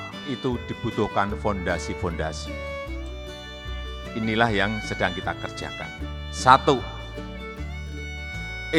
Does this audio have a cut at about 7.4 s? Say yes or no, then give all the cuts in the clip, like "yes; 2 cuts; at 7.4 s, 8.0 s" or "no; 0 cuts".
no; 2 cuts; at 2.4 s, 4.0 s